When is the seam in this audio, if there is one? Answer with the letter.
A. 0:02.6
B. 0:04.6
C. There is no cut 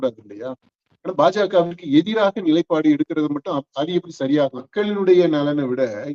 B